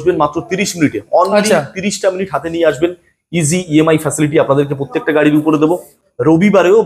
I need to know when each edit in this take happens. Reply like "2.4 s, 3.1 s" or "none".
5.9 s